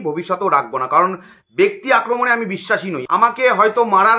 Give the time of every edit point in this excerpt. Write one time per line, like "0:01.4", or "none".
0:02.9